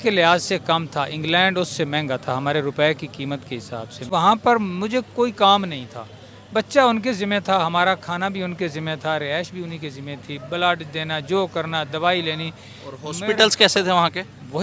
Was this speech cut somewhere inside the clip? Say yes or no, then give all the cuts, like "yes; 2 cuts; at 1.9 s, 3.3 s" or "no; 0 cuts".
yes; 1 cut; at 4.0 s